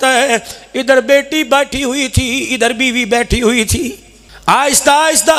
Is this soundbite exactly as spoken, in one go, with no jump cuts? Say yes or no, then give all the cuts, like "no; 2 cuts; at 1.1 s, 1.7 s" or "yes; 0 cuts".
yes; 0 cuts